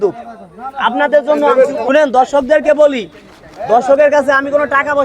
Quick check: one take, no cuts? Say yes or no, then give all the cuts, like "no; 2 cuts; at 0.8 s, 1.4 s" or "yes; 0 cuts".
no; 1 cut; at 1.8 s